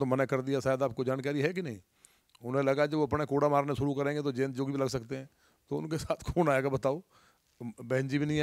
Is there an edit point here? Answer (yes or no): no